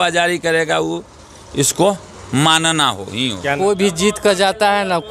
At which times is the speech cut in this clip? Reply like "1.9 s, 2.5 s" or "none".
none